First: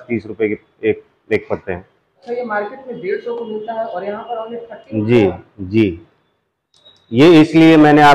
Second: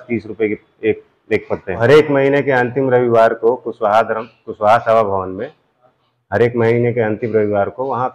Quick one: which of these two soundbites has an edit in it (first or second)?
second